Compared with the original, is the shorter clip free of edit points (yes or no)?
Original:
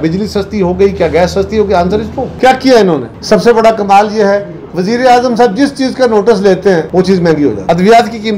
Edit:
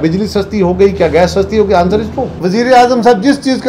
no